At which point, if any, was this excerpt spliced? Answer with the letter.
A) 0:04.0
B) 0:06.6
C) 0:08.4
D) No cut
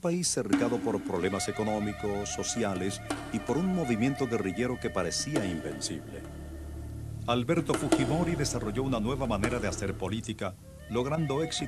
B